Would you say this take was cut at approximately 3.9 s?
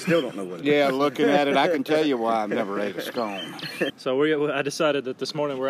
yes; 1 cut; at 3.9 s

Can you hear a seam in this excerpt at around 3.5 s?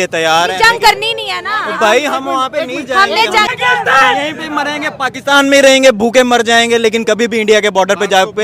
yes; 1 cut; at 3.5 s

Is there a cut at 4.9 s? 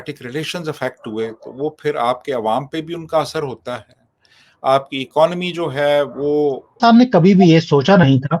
no; 1 cut; at 6.7 s

